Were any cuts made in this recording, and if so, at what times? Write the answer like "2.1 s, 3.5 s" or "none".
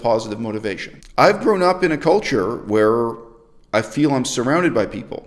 0.9 s